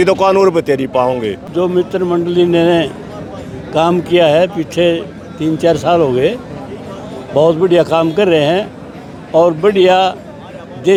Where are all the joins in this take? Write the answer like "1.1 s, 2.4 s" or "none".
none